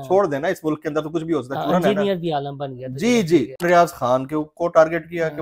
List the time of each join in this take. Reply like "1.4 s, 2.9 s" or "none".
3.6 s